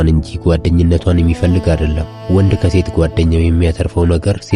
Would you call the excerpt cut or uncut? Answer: uncut